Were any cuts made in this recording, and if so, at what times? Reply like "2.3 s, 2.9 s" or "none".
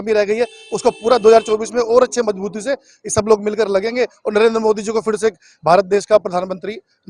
none